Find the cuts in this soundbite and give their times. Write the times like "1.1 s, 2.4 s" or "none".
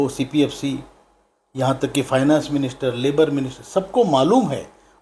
none